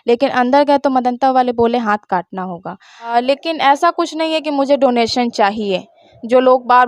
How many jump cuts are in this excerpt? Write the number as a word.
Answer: one